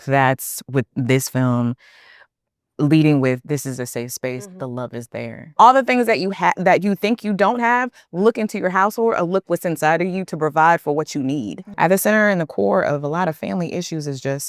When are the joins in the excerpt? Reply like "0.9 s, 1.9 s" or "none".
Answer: 5.4 s, 11.6 s